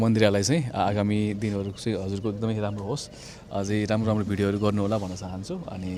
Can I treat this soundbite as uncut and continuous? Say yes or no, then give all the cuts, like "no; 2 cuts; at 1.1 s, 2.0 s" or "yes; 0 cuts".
yes; 0 cuts